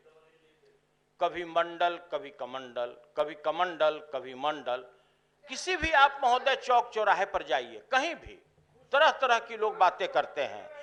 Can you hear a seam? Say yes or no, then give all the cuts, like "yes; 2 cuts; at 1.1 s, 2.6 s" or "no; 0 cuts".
no; 0 cuts